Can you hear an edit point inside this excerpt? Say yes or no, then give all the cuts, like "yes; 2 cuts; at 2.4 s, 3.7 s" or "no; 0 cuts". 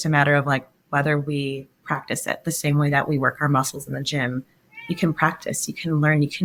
no; 0 cuts